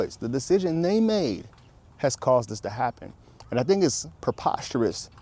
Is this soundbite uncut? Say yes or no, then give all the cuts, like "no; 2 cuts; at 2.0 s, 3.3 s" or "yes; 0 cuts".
yes; 0 cuts